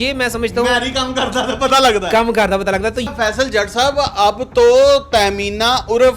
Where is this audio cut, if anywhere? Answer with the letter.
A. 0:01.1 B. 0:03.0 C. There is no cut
B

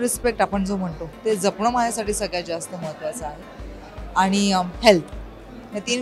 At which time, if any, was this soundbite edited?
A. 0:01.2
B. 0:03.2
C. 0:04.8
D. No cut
D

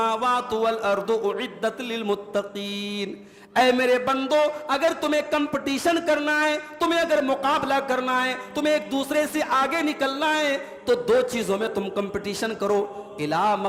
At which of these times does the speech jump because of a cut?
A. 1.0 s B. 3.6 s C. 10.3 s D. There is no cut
D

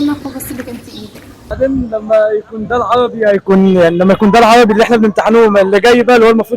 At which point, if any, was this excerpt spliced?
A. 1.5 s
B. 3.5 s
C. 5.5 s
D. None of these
A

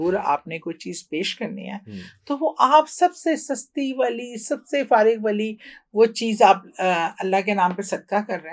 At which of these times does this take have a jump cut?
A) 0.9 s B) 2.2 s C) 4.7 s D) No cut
D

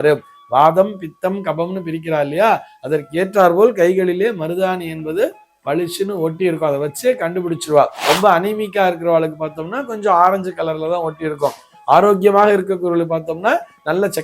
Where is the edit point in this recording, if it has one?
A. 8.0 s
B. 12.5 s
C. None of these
A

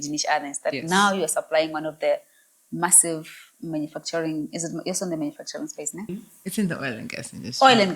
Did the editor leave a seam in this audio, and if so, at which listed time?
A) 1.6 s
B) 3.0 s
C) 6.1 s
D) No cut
C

